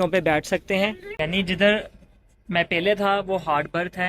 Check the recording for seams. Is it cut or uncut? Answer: cut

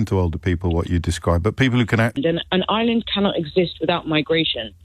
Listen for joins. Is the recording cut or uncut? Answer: cut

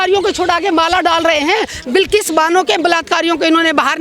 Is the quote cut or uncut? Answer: uncut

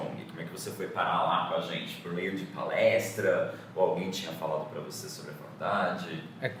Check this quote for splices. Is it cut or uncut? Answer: uncut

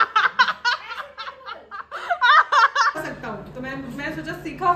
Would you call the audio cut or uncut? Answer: cut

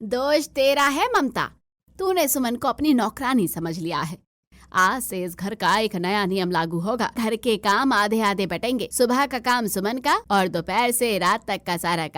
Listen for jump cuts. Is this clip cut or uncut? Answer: cut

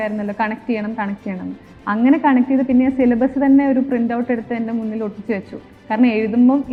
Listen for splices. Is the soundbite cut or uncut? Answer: uncut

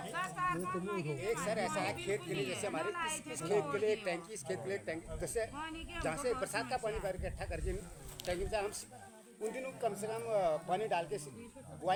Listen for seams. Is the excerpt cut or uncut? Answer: uncut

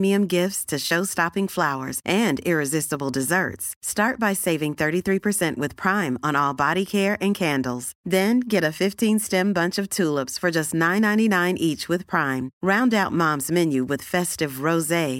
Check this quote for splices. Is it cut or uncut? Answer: uncut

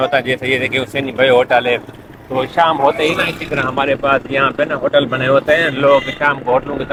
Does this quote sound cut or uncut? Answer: uncut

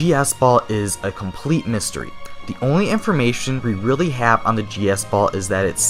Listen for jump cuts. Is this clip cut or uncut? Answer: uncut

